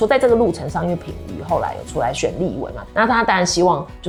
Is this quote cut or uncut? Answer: uncut